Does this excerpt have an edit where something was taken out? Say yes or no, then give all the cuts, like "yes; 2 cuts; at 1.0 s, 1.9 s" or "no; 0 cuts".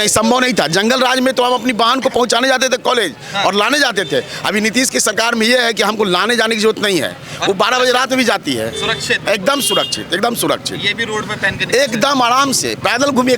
no; 0 cuts